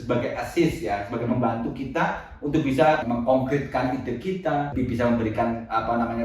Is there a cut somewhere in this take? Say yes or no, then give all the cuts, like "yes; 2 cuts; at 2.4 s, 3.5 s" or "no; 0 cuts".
yes; 2 cuts; at 3.0 s, 4.7 s